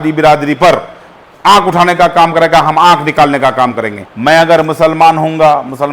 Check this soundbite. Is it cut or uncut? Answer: cut